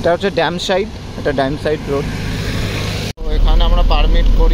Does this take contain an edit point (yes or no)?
yes